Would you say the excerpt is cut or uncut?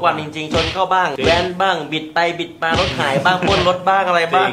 uncut